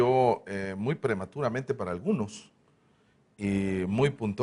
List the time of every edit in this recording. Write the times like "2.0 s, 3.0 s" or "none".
none